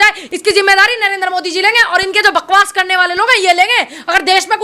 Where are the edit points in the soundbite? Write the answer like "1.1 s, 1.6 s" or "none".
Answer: none